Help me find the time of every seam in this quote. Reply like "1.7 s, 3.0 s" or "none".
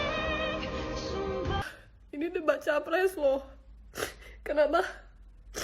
1.6 s